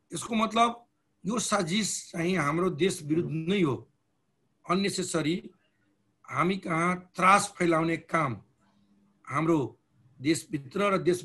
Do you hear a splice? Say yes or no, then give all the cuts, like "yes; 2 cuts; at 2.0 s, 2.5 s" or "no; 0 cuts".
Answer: no; 0 cuts